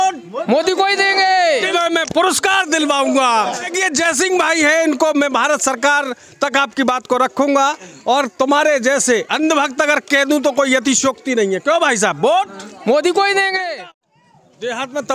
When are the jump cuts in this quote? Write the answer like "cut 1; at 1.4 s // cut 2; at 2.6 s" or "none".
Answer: cut 1; at 1.7 s // cut 2; at 3.7 s // cut 3; at 13.6 s